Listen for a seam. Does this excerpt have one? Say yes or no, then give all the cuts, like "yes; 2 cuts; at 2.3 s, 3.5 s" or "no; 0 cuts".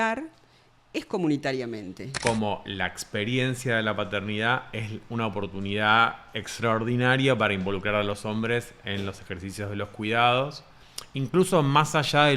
yes; 1 cut; at 2.1 s